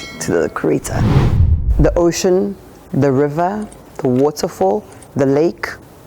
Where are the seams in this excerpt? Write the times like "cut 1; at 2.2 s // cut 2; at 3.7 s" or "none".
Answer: cut 1; at 1.3 s

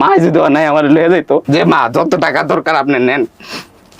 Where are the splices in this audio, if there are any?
cut 1; at 1.4 s

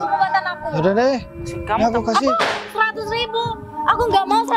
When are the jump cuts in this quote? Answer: none

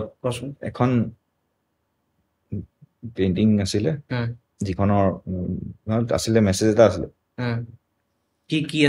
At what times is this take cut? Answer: none

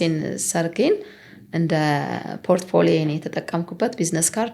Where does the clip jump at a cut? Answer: none

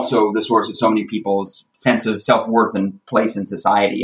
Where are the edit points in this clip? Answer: none

